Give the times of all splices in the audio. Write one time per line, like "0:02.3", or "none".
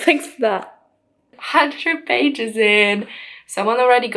0:01.3